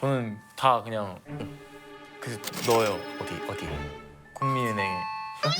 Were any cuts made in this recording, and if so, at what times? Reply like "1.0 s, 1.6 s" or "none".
none